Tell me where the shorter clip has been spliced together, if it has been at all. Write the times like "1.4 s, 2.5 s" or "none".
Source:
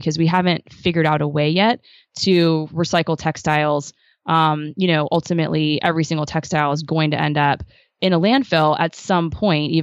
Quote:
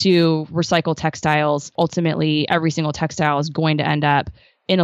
1.7 s